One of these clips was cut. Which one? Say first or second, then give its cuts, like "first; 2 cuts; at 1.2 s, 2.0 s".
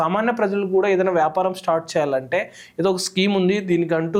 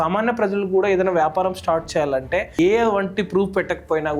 second; 1 cut; at 2.6 s